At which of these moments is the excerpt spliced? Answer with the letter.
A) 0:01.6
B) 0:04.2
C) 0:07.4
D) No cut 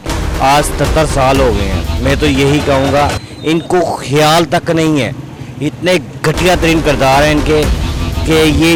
D